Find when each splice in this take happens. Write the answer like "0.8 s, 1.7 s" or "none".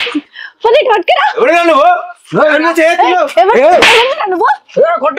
none